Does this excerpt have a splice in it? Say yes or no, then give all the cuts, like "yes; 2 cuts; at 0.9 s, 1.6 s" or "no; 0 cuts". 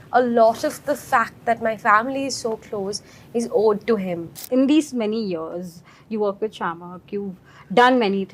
yes; 1 cut; at 4.4 s